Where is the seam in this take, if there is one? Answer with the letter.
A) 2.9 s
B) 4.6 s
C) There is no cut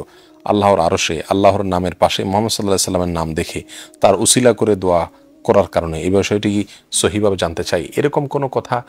C